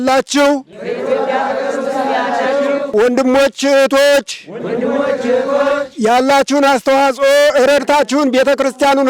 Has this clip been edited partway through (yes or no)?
yes